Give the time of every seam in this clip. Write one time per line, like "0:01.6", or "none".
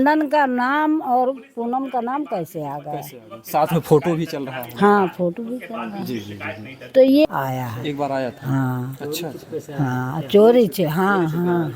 0:07.2